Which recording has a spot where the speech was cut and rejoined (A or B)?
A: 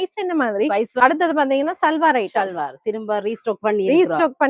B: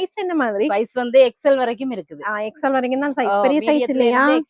A